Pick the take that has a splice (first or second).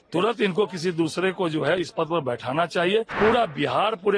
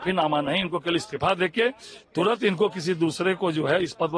first